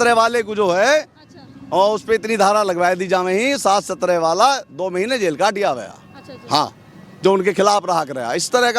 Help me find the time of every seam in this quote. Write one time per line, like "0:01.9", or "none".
none